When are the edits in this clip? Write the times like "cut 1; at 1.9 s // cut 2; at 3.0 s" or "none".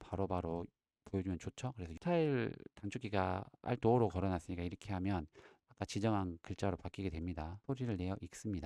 cut 1; at 1.9 s // cut 2; at 7.6 s

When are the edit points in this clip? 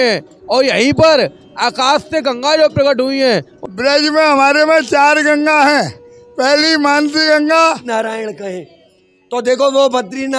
cut 1; at 3.5 s // cut 2; at 7.8 s

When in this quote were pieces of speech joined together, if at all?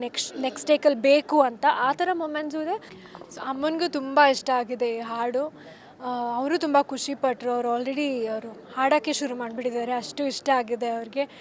cut 1; at 3.0 s

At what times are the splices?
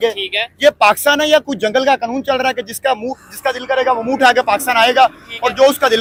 none

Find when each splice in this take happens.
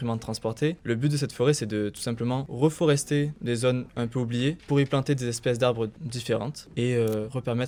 none

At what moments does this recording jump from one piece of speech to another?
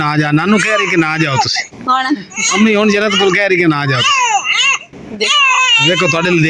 none

